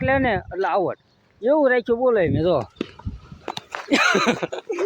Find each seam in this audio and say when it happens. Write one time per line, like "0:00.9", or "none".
0:02.7